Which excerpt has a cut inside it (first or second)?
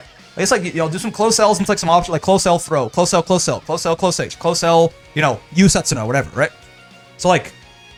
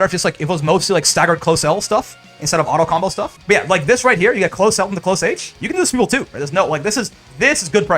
second